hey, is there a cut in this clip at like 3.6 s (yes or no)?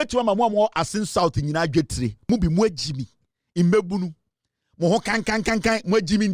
no